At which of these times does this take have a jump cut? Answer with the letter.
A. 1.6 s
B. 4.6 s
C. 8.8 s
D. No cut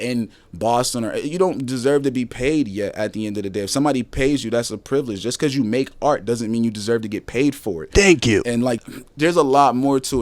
C